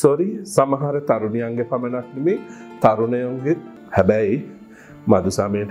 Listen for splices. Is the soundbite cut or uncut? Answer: cut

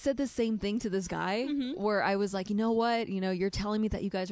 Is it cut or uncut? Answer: uncut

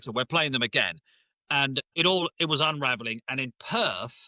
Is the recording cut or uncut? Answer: uncut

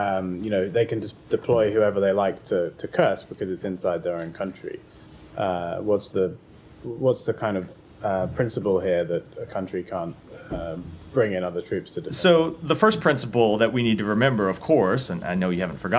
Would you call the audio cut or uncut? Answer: uncut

